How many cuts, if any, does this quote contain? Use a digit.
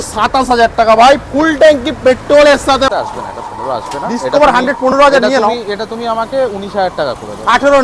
1